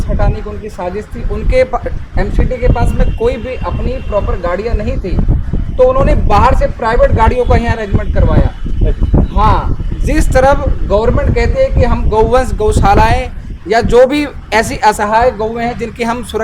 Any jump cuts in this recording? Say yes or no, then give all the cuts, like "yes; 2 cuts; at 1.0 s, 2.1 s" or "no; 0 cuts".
no; 0 cuts